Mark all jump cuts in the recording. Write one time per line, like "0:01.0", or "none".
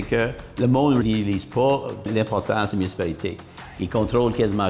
0:01.0
0:02.1